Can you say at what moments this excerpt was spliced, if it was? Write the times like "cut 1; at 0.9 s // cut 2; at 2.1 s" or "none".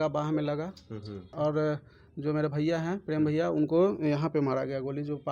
cut 1; at 1.3 s